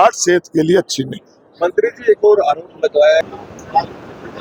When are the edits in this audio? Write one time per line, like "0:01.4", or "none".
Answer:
none